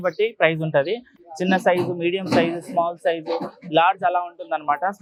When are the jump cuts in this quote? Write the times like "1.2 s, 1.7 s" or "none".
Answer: none

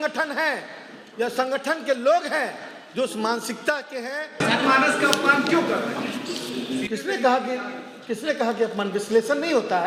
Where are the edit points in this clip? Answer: 4.4 s

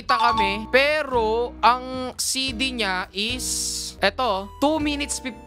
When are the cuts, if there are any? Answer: none

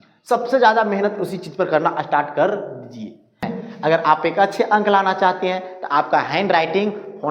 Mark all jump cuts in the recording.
3.5 s

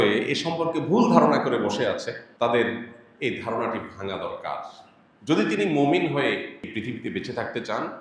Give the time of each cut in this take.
2.2 s, 6.6 s

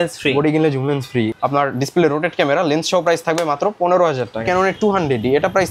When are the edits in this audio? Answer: 1.3 s, 4.4 s

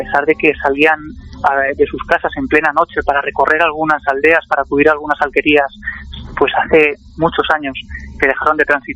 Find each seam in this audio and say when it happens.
none

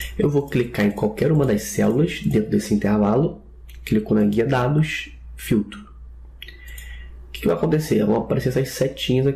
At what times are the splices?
4.0 s

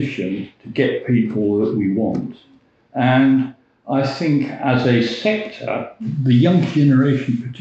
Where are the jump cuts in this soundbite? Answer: 6.1 s

